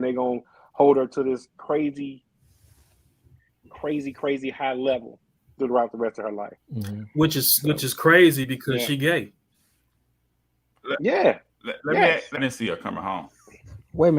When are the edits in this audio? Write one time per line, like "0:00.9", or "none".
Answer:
0:12.4